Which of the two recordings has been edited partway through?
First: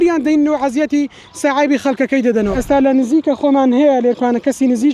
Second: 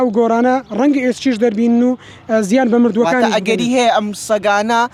first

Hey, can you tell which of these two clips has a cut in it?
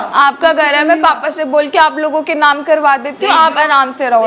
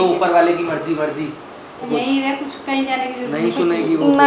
second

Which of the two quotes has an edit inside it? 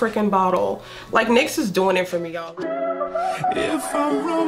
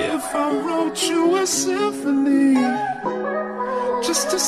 first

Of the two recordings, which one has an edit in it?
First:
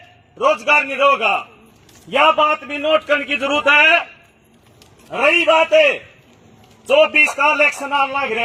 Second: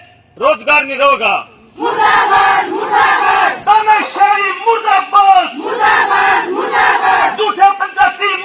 second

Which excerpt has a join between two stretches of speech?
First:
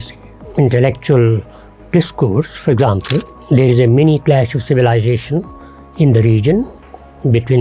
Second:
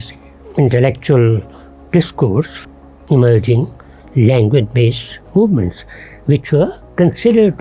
second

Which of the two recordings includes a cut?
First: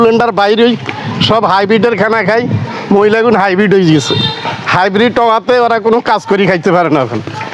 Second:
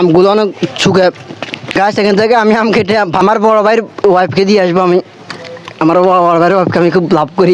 second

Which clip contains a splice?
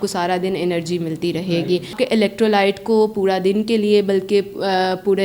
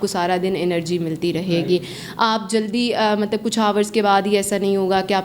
first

